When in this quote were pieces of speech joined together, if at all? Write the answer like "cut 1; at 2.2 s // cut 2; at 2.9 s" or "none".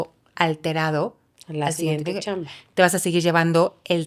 none